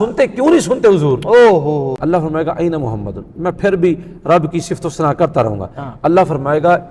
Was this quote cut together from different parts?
yes; 1 cut; at 1.9 s

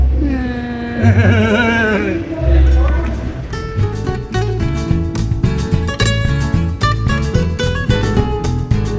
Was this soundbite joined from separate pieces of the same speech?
no; 0 cuts

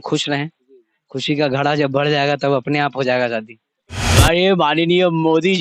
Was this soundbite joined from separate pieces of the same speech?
yes; 1 cut; at 4.0 s

